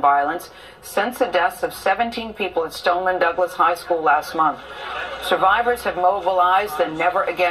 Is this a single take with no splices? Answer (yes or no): no